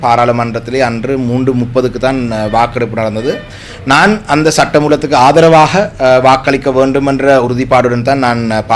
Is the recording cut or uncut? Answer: uncut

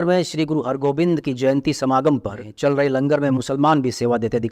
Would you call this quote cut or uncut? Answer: cut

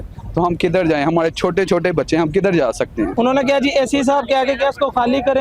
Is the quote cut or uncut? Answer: cut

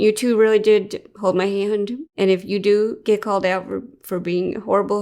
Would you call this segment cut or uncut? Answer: cut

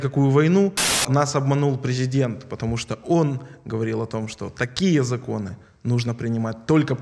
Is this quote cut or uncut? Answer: cut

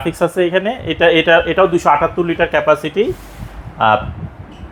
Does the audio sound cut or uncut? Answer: uncut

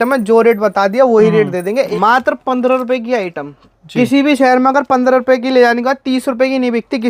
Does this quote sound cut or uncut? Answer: cut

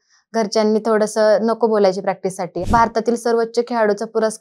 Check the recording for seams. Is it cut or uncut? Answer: cut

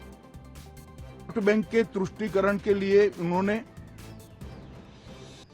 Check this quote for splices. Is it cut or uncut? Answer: cut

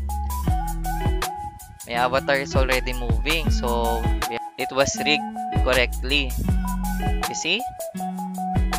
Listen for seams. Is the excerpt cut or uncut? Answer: uncut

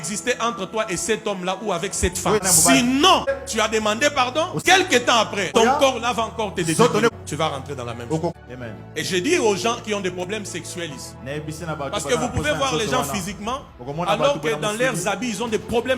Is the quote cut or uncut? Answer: cut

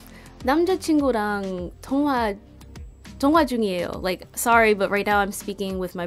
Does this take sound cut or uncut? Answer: uncut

